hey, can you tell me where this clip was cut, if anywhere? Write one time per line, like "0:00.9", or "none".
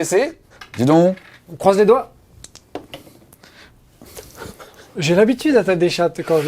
none